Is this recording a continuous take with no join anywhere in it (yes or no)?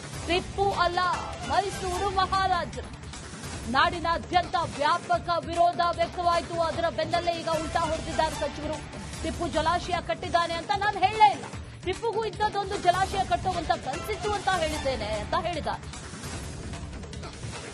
yes